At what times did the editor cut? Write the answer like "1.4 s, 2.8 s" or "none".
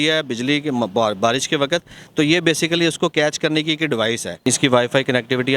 4.3 s